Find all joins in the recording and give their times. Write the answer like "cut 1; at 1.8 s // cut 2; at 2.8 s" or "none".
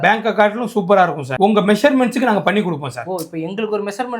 cut 1; at 1.4 s

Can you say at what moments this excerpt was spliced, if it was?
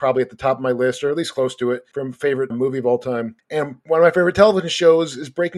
cut 1; at 2.3 s // cut 2; at 3.6 s

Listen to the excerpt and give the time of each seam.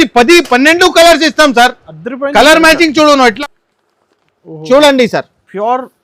cut 1; at 3.4 s

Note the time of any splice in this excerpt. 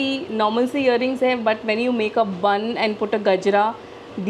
none

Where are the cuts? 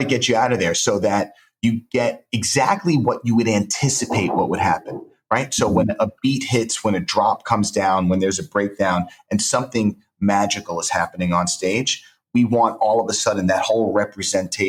none

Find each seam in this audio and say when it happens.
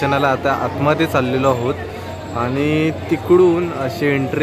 none

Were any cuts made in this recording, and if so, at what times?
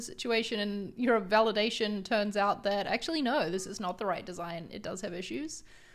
none

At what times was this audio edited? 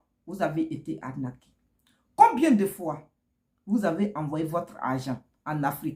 none

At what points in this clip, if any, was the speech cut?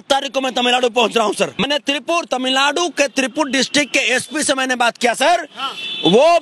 cut 1; at 1.7 s

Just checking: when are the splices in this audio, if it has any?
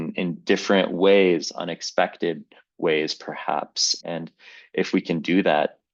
cut 1; at 3.8 s

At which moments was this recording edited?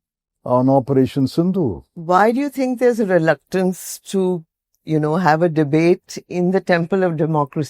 none

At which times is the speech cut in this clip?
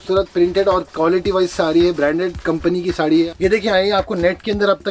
cut 1; at 3.1 s

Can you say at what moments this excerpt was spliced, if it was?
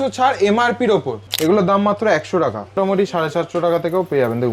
cut 1; at 1.2 s // cut 2; at 2.8 s

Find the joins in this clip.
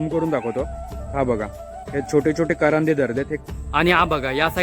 cut 1; at 3.4 s

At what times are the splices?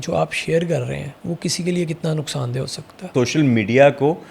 cut 1; at 1.1 s // cut 2; at 3.1 s

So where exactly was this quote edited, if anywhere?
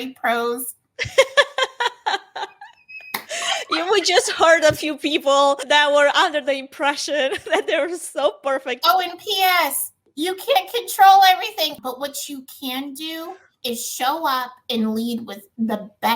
cut 1; at 8.7 s // cut 2; at 11.8 s

